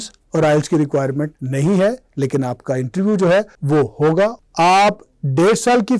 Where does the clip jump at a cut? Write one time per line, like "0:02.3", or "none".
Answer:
0:01.4
0:03.6
0:04.4